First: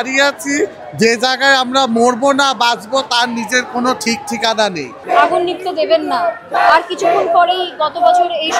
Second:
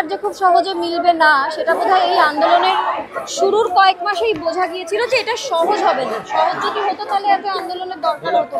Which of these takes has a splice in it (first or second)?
first